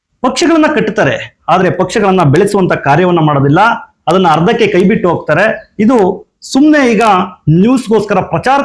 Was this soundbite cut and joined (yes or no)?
no